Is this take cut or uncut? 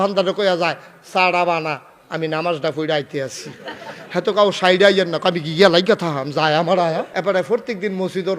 cut